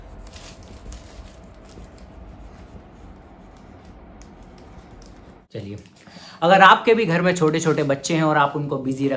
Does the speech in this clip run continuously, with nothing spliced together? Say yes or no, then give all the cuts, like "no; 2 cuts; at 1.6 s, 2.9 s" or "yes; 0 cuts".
yes; 0 cuts